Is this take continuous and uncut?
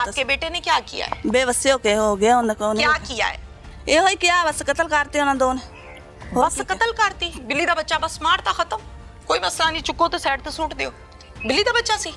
yes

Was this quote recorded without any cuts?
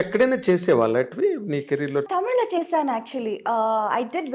no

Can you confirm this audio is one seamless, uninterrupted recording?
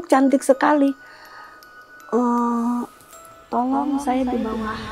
yes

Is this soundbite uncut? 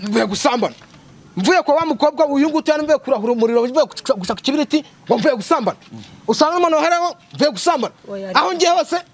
yes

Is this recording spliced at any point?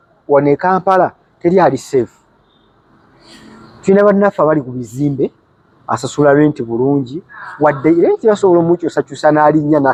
no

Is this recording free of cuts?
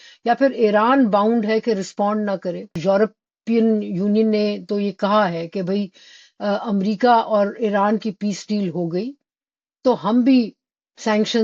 no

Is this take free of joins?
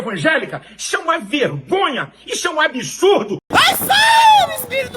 no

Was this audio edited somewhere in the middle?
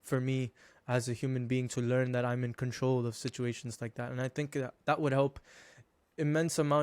no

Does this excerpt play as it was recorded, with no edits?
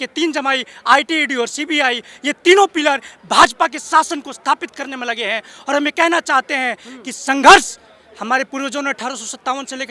yes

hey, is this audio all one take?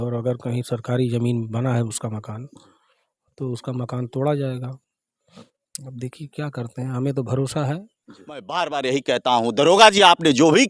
no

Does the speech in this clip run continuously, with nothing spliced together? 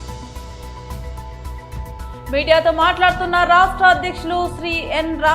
no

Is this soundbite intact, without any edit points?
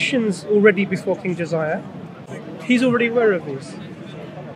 no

